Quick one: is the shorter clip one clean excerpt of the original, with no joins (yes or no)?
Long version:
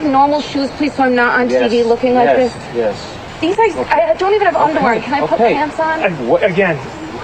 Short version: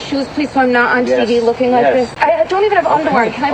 no